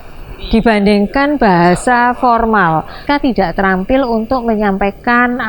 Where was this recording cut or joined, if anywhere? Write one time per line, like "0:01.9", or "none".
0:03.0